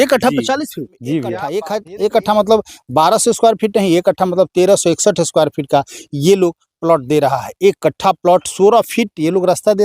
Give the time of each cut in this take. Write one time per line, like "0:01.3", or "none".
0:01.7